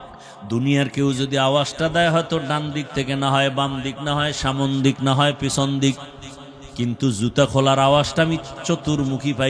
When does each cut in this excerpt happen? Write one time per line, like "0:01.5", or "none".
none